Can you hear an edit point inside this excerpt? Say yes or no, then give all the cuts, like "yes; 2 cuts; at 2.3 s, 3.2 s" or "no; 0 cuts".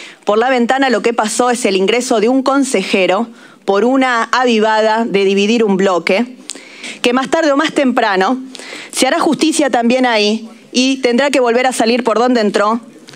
no; 0 cuts